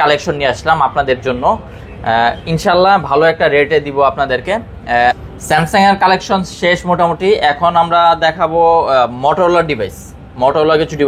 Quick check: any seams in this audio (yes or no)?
yes